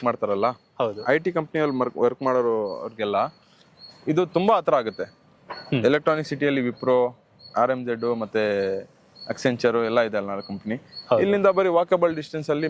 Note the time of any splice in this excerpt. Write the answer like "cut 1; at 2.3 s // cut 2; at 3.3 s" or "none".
none